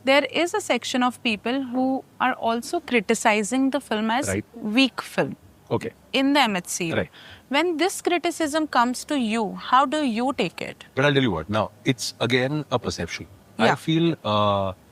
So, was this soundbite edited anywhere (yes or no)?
no